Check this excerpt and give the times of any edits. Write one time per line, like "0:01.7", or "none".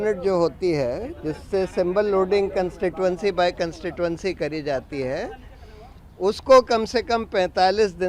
none